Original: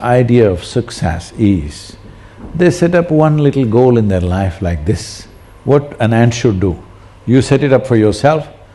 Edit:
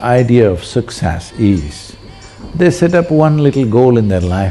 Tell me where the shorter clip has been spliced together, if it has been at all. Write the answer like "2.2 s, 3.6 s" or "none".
none

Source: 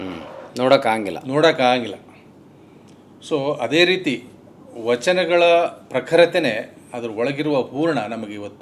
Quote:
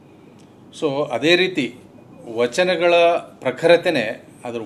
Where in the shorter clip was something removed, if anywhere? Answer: none

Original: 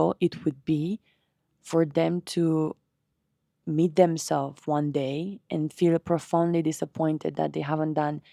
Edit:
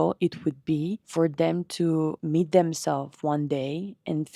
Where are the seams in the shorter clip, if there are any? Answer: 1.0 s, 2.2 s

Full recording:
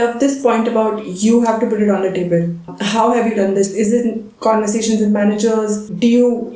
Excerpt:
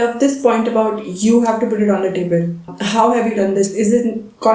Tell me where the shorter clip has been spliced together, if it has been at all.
none

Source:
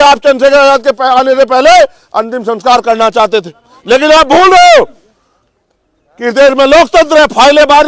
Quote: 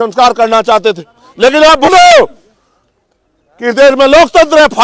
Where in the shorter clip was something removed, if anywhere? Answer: 1.9 s

